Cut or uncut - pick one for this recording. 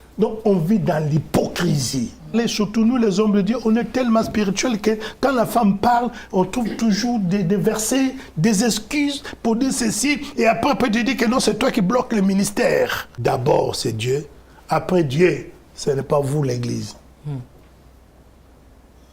cut